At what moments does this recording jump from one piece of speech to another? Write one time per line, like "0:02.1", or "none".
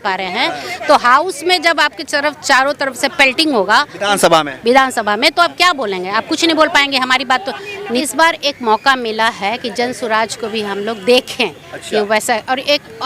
0:08.0